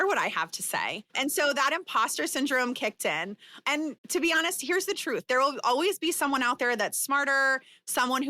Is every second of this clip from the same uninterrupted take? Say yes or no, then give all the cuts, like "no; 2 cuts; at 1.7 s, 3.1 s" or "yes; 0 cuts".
no; 3 cuts; at 1.0 s, 2.8 s, 4.0 s